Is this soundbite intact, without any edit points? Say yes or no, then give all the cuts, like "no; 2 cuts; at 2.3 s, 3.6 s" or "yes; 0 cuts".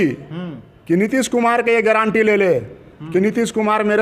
yes; 0 cuts